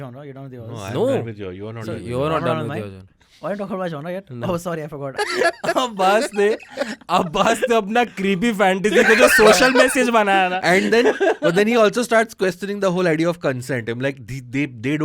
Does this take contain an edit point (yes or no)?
yes